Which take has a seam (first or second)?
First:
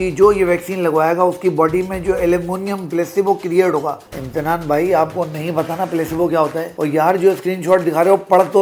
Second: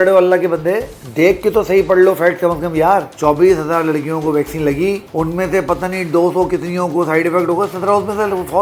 second